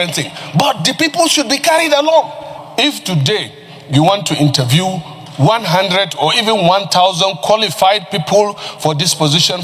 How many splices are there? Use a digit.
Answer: 1